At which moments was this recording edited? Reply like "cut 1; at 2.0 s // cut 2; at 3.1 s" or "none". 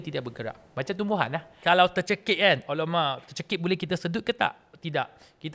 cut 1; at 1.6 s

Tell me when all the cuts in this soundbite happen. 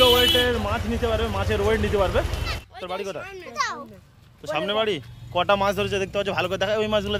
cut 1; at 2.6 s

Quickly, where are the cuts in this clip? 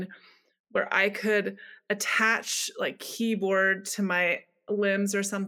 none

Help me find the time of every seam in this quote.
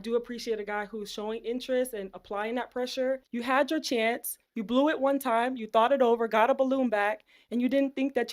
cut 1; at 3.2 s

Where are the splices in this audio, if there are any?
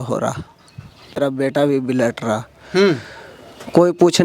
cut 1; at 1.2 s

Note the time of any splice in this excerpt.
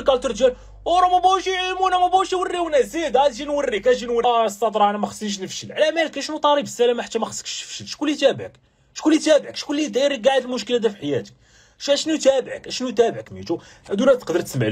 cut 1; at 4.2 s // cut 2; at 13.2 s

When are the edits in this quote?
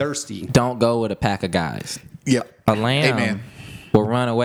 none

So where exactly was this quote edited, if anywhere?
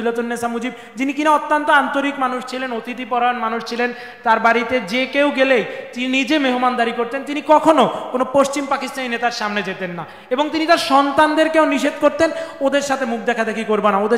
none

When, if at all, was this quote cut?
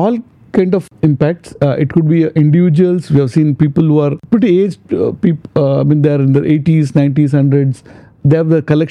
cut 1; at 0.9 s // cut 2; at 4.2 s

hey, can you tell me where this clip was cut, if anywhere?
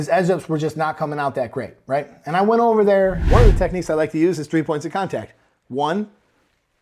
cut 1; at 3.2 s

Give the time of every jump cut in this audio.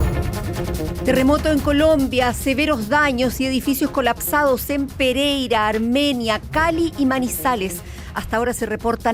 cut 1; at 1.0 s

